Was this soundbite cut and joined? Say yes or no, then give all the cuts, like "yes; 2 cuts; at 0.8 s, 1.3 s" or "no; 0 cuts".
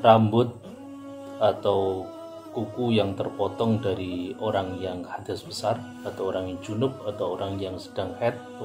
no; 0 cuts